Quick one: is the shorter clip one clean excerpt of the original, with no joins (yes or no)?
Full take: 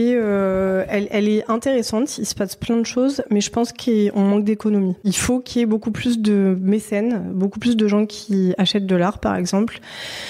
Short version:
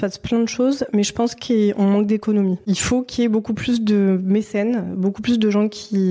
yes